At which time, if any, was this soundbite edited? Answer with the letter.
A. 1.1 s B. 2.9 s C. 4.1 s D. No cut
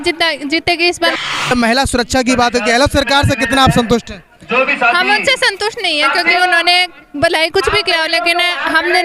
A